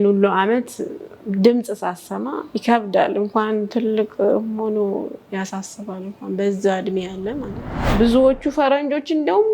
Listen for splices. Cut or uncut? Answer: cut